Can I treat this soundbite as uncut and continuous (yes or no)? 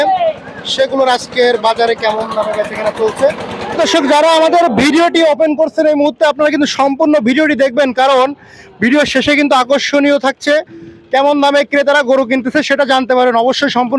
no